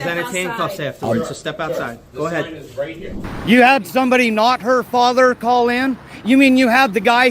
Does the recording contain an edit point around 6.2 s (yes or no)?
no